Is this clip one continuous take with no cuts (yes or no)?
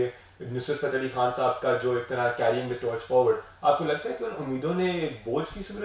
yes